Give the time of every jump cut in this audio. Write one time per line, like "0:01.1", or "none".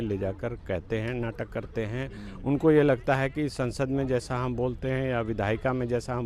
none